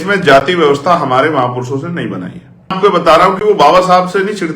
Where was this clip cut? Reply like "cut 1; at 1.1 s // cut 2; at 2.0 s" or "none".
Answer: cut 1; at 2.8 s